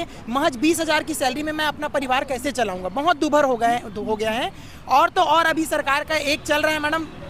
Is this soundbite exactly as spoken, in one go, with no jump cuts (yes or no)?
yes